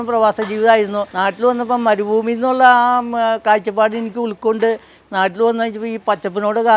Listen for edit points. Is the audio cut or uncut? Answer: cut